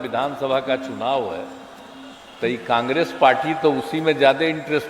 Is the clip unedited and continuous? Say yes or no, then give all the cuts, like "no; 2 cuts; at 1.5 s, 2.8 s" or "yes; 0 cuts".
yes; 0 cuts